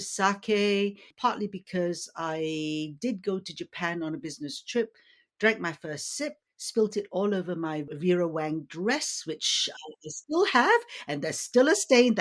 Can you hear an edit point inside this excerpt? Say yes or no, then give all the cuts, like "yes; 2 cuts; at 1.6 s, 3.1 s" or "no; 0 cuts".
yes; 2 cuts; at 1.1 s, 7.8 s